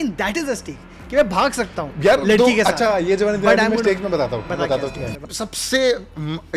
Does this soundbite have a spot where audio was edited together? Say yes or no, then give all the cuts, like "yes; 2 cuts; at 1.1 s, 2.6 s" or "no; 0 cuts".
yes; 1 cut; at 5.2 s